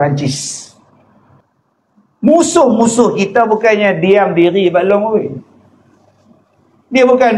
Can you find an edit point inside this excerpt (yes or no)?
yes